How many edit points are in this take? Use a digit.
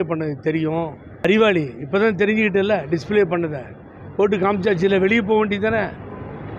1